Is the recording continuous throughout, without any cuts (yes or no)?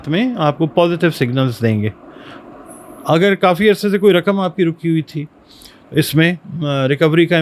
yes